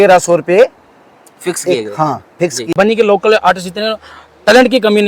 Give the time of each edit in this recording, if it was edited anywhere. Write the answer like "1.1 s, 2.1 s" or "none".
2.7 s